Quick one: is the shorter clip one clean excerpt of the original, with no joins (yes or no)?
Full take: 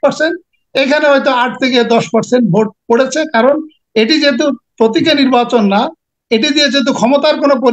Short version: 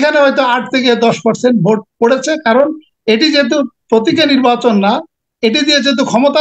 yes